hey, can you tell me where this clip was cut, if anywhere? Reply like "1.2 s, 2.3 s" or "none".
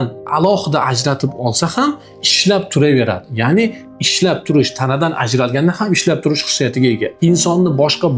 none